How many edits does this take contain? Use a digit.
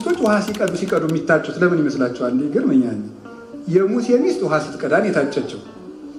0